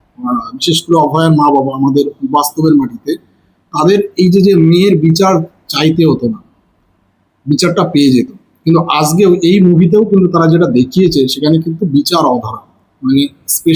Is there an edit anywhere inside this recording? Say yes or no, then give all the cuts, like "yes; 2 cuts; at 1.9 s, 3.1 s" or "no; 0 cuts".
no; 0 cuts